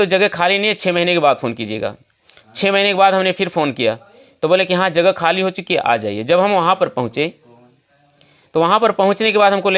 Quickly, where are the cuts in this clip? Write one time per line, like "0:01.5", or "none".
none